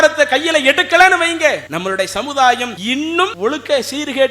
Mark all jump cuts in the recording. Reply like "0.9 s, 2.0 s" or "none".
1.7 s, 3.0 s

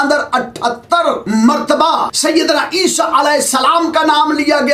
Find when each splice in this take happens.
1.2 s, 2.1 s

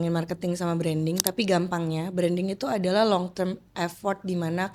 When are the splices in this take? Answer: none

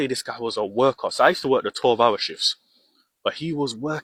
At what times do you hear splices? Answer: none

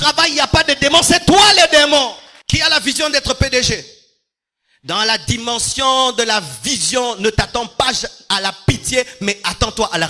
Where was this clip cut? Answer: 2.3 s

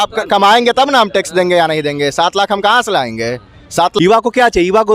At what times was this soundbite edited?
0.9 s, 3.9 s

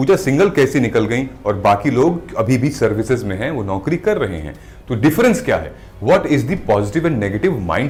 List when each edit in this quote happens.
none

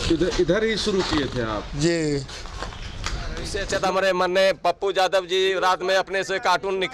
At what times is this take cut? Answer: 3.5 s

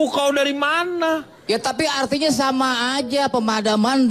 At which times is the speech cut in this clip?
1.3 s

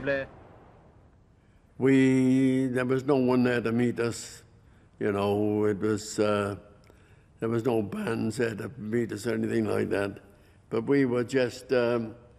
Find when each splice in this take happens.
11.1 s

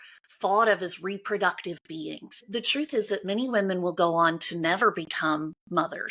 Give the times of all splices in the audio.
2.4 s

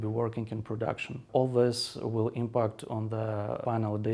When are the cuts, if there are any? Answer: 1.2 s

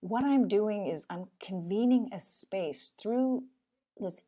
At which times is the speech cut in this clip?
1.1 s

